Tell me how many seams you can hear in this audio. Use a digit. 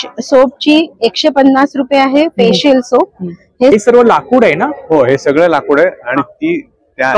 1